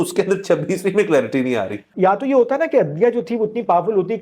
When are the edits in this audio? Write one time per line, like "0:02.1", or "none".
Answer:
0:01.9